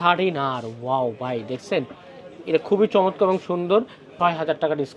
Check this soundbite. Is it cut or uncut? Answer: cut